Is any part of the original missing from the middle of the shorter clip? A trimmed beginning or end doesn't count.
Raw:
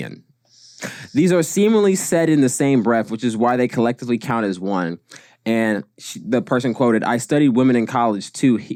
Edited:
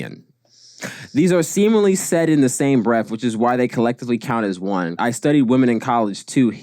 yes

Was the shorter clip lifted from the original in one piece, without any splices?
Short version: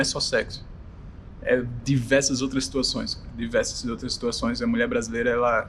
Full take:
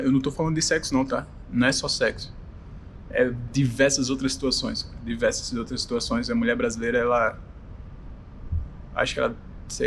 yes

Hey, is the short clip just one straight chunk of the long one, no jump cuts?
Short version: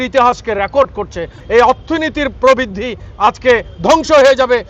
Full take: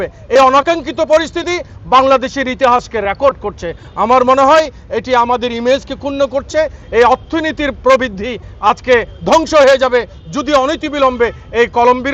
no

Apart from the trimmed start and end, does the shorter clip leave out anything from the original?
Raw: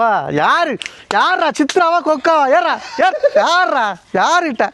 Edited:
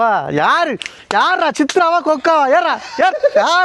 no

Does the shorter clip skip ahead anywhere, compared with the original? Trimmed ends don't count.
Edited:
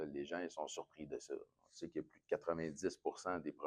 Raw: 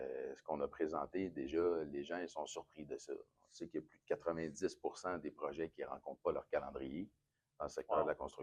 no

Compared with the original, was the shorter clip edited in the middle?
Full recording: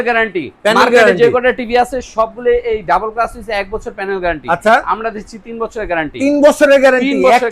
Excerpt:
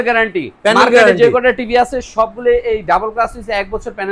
no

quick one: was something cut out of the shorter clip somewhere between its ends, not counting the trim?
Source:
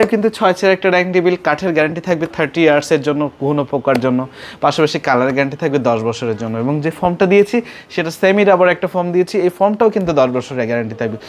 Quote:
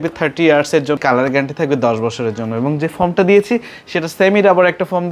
yes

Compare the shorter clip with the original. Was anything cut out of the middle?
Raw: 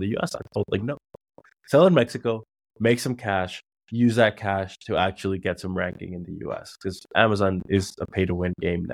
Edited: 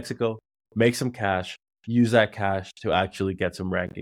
no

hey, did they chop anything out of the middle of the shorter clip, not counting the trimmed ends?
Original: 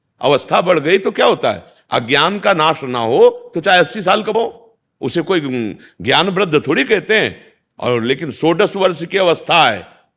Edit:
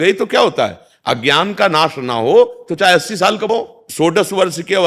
yes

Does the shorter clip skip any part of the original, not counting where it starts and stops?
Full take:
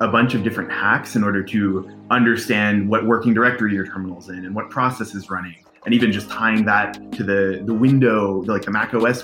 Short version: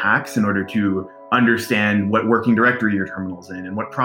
no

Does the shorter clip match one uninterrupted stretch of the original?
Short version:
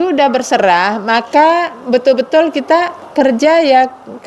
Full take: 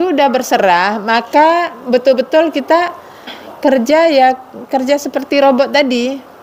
no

